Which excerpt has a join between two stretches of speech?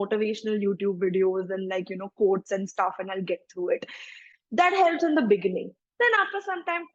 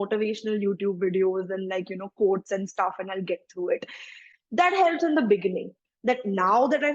second; 1 cut; at 5.8 s

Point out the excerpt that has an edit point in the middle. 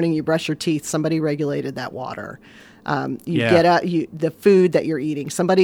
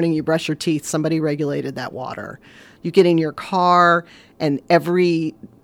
second; 1 cut; at 2.6 s

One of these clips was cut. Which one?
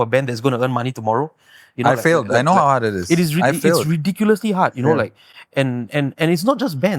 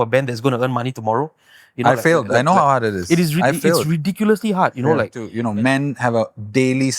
second; 1 cut; at 5.2 s

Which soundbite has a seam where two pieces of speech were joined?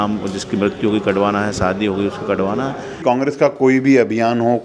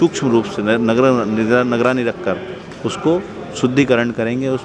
first; 1 cut; at 3.0 s

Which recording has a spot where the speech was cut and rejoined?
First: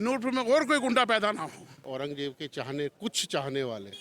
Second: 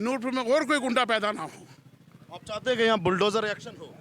first; 1 cut; at 1.9 s

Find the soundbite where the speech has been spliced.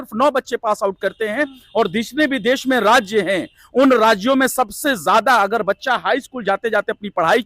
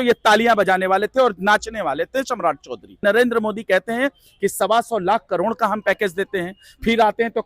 second; 1 cut; at 3.0 s

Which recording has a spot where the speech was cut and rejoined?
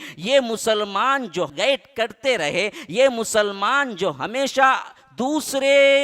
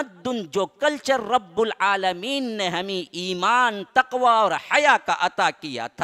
first; 1 cut; at 1.5 s

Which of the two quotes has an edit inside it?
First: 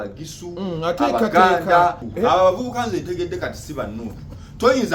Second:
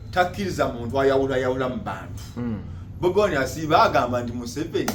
first; 1 cut; at 2.1 s

